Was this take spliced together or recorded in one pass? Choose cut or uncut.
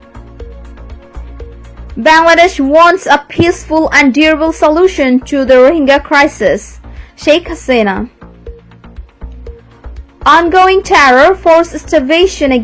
cut